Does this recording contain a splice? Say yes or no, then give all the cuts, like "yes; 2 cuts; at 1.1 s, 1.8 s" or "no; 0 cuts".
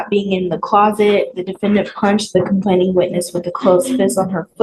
no; 0 cuts